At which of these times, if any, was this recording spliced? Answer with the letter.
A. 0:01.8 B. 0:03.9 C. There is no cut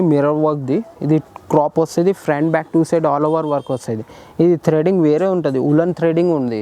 C